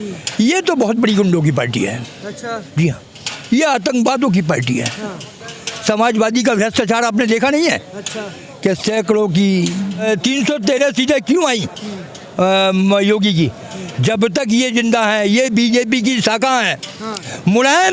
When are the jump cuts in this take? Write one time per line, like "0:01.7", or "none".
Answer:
0:10.0